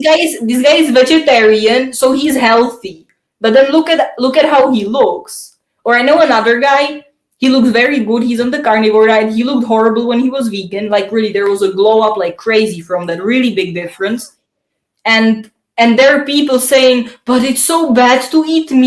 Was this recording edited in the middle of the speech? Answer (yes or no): no